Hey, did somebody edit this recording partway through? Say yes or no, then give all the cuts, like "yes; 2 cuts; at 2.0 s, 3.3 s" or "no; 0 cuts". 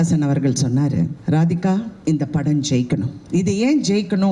yes; 3 cuts; at 1.2 s, 1.9 s, 3.2 s